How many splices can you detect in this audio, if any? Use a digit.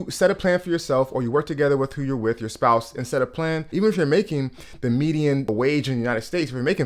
2